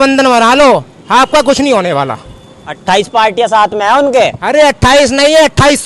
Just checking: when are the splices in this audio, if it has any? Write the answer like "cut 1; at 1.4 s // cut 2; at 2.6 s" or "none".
none